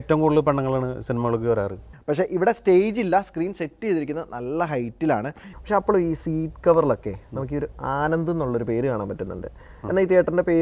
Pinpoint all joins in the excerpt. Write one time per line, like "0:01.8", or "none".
0:01.9
0:05.5